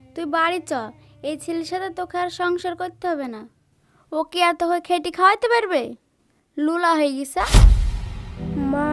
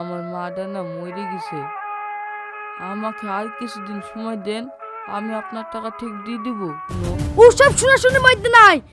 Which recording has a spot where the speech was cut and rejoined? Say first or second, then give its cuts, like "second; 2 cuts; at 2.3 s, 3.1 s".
second; 1 cut; at 6.9 s